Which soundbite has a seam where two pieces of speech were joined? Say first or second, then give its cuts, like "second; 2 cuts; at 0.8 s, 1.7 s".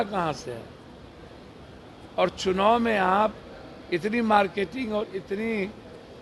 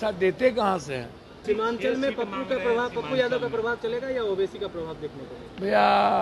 second; 1 cut; at 1.4 s